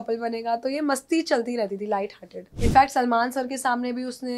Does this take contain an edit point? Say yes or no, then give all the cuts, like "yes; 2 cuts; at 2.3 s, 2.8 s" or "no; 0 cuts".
yes; 1 cut; at 2.4 s